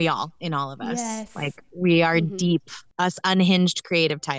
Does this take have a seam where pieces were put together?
yes; 1 cut; at 2.9 s

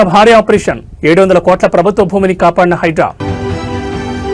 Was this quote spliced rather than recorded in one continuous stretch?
yes; 1 cut; at 3.2 s

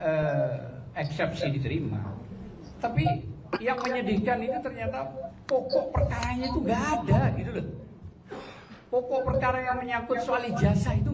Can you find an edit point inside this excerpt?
no; 0 cuts

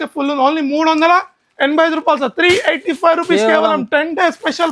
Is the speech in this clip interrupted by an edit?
no; 0 cuts

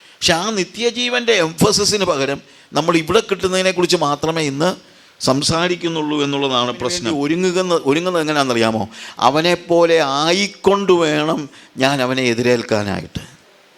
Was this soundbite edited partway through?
yes; 1 cut; at 7.0 s

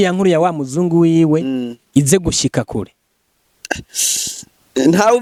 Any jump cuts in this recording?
no; 0 cuts

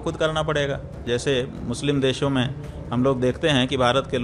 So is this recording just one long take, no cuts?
no; 1 cut; at 1.0 s

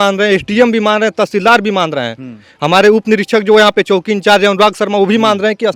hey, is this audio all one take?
yes; 0 cuts

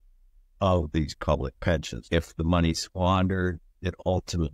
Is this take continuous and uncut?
no; 1 cut; at 1.9 s

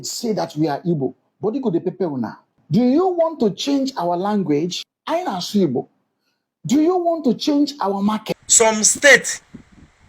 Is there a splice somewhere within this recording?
yes; 1 cut; at 8.2 s

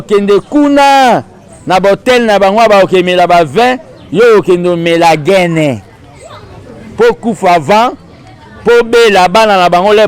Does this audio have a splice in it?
no; 0 cuts

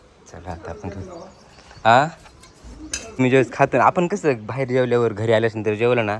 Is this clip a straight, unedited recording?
no; 1 cut; at 3.2 s

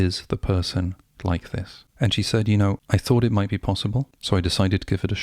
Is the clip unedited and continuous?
no; 3 cuts; at 1.8 s, 2.8 s, 4.1 s

